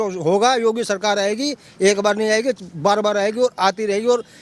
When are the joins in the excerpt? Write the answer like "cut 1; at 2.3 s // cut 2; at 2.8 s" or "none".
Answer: none